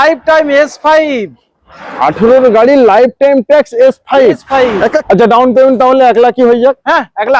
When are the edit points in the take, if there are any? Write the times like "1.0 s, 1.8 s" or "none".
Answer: 5.0 s